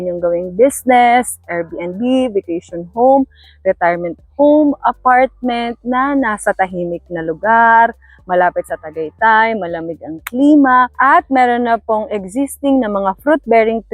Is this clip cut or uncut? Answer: uncut